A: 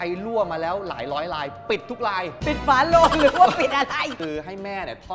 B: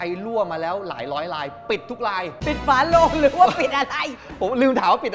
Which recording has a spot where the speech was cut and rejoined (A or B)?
A